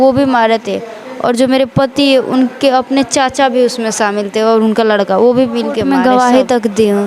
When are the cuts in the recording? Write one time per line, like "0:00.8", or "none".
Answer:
0:05.8